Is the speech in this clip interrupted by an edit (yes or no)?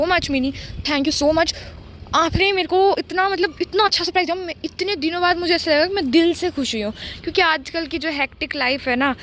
no